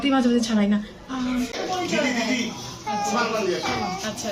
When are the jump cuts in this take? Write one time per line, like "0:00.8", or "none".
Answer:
0:01.6